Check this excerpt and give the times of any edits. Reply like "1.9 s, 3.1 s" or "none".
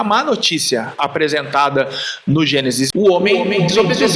2.9 s